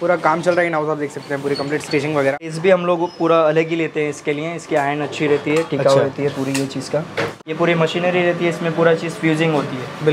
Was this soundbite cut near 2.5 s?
yes; 2 cuts; at 2.5 s, 7.3 s

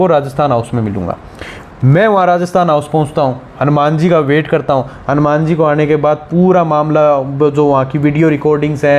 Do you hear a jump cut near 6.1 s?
no; 0 cuts

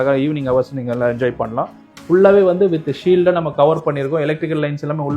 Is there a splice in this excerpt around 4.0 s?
no; 1 cut; at 1.8 s

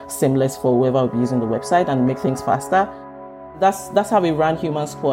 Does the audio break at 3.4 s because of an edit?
yes; 1 cut; at 3.4 s

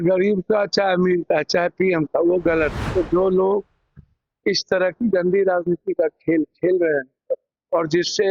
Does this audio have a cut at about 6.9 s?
no; 1 cut; at 2.8 s

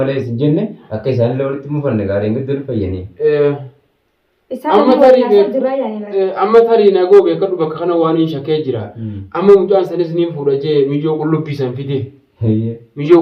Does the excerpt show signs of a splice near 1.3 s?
no; 0 cuts

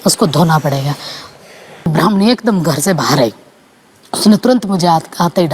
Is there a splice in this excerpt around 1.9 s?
yes; 1 cut; at 1.9 s

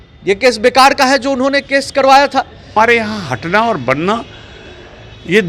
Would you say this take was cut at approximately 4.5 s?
no; 1 cut; at 2.7 s

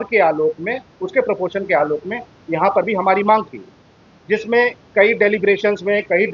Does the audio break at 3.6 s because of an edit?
no; 0 cuts

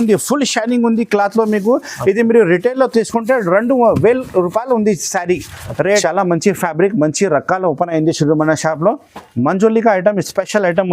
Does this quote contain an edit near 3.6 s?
no; 1 cut; at 6.0 s

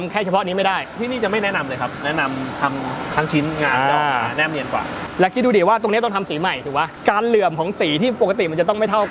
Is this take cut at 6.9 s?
yes; 5 cuts; at 0.9 s, 2.0 s, 3.1 s, 5.0 s, 6.9 s

